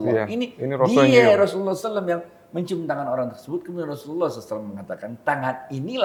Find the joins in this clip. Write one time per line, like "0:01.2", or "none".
none